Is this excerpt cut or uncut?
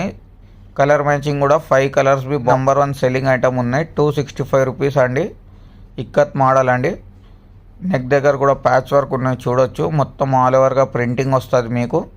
cut